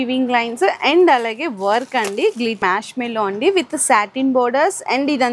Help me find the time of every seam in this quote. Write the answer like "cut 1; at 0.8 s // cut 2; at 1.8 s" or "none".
cut 1; at 2.6 s